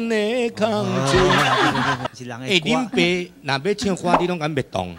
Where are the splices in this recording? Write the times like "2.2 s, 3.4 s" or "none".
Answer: 2.0 s

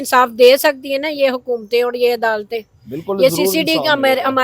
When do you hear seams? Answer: none

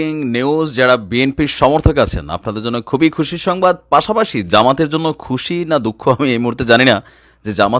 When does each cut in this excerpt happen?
none

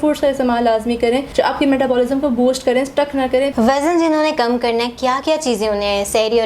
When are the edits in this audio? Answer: 1.3 s, 3.5 s

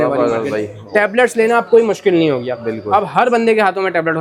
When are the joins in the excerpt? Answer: none

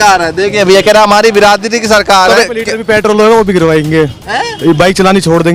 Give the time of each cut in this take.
2.3 s

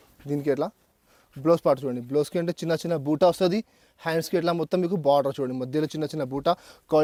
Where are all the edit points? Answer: none

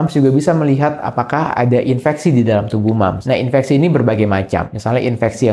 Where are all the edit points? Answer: 3.2 s

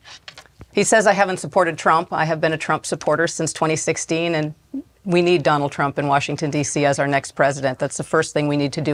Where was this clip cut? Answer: none

